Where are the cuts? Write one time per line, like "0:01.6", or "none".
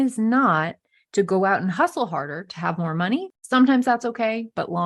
0:03.4